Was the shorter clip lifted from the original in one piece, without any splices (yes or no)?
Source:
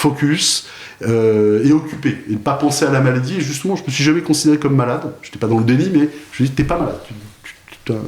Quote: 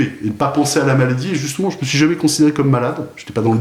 yes